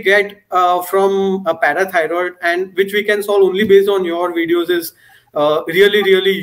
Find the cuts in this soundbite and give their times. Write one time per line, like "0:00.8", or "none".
none

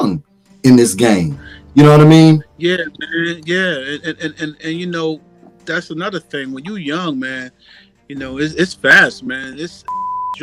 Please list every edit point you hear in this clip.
none

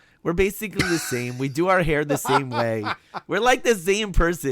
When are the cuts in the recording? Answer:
none

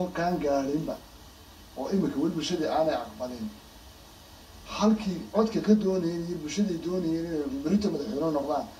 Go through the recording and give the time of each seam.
none

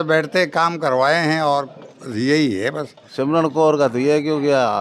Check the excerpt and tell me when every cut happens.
0:03.1

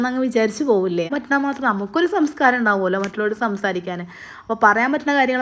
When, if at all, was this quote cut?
0:01.1

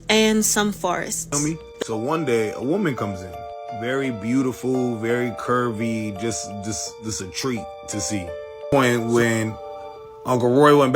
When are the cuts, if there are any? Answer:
0:01.2
0:08.6

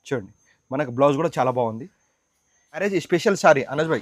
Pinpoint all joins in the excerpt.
0:02.8

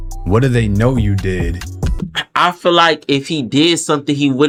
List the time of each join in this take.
none

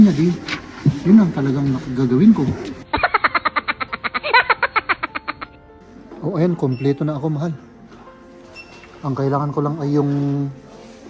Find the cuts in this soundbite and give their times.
0:02.8
0:06.0

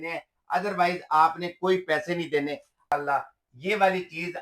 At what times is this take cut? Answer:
0:02.9

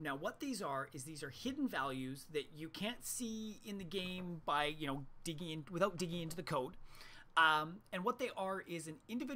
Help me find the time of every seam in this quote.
0:05.3

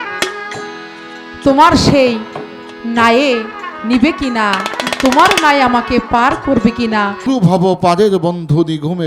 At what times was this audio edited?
0:07.3

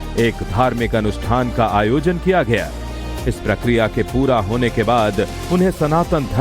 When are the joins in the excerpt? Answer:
0:02.2

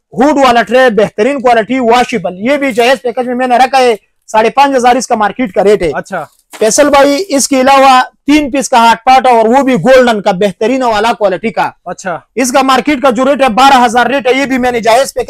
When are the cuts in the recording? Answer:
none

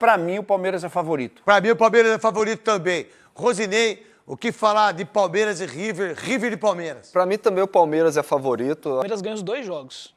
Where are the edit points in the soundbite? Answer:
0:09.0

